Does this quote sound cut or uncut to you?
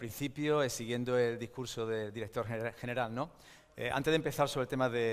uncut